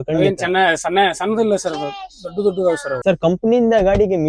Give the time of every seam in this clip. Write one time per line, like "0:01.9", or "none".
0:02.9